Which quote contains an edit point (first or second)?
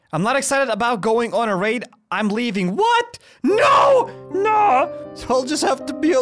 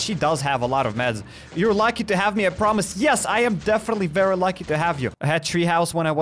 second